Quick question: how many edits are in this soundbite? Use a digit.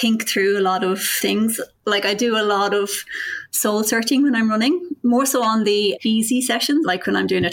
0